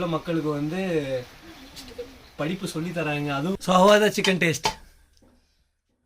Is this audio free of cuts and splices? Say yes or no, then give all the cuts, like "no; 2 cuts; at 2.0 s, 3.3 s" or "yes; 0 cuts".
no; 1 cut; at 3.6 s